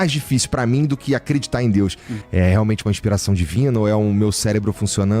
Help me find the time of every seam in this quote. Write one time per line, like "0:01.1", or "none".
0:02.2

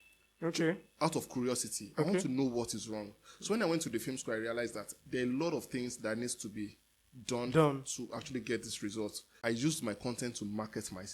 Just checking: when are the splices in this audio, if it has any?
0:09.3

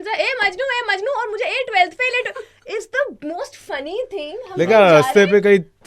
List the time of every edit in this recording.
none

